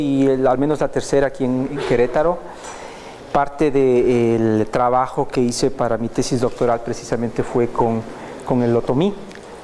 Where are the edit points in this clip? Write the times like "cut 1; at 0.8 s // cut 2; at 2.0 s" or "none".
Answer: none